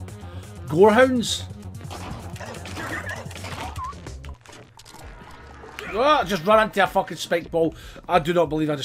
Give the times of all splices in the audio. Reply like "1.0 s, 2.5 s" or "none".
1.7 s